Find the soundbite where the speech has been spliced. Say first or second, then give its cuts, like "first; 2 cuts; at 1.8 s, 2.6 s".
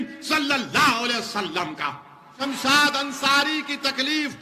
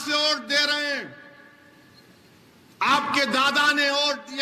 first; 1 cut; at 2.4 s